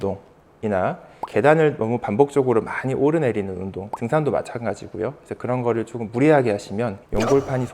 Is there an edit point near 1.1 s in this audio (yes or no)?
yes